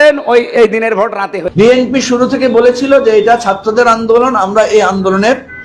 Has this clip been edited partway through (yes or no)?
yes